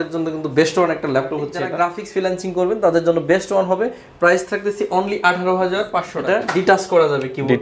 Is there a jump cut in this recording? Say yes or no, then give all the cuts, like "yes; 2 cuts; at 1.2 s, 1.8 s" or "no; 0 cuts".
yes; 2 cuts; at 1.6 s, 6.1 s